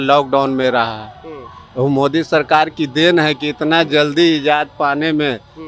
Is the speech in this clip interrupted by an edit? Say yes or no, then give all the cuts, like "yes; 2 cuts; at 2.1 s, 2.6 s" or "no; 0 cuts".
no; 0 cuts